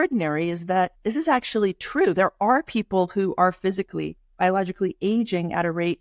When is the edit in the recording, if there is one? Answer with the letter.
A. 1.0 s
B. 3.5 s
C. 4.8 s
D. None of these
A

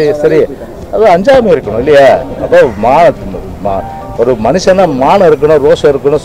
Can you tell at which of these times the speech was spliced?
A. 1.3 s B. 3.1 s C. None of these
C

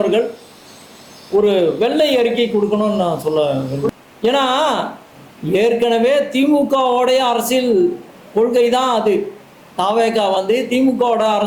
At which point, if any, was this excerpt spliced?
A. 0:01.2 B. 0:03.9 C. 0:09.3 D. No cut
B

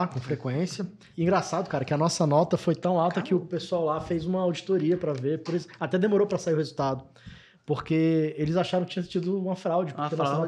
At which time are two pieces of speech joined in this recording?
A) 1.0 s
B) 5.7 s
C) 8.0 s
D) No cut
A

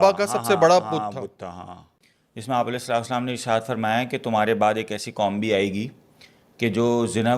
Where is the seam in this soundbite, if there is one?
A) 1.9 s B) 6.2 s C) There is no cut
A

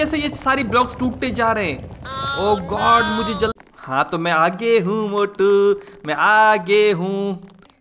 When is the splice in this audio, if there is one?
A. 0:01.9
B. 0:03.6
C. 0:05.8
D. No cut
B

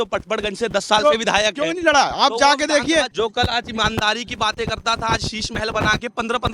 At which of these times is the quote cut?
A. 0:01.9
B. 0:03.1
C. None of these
B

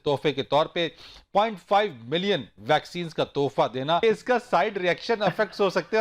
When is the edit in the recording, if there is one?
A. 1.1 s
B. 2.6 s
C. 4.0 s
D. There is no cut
C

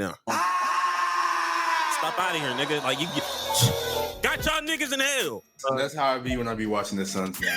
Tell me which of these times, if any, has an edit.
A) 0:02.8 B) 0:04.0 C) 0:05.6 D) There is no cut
C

